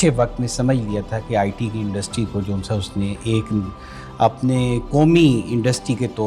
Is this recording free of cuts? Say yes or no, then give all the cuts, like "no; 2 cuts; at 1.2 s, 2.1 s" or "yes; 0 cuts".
yes; 0 cuts